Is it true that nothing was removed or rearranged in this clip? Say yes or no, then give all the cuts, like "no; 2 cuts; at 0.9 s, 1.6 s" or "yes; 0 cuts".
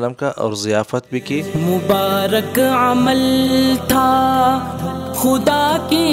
no; 1 cut; at 1.5 s